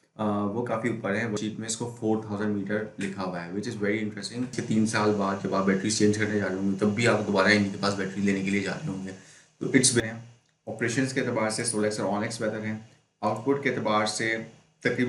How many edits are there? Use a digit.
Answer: 3